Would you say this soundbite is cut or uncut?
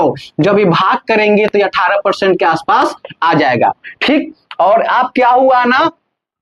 uncut